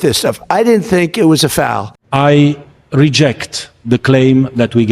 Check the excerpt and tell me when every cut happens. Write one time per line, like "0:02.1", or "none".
0:02.0